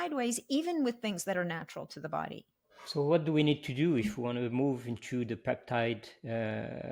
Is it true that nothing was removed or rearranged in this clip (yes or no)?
yes